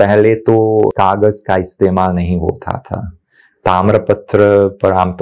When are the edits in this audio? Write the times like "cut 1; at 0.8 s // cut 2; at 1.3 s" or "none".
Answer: cut 1; at 0.9 s